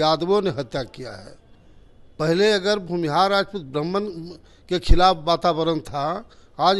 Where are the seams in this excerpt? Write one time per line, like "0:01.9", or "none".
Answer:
none